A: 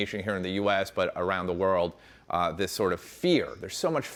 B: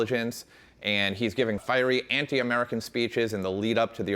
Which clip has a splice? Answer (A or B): B